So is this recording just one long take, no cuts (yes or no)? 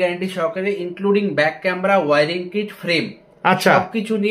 yes